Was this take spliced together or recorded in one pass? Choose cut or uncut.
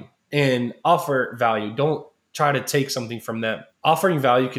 cut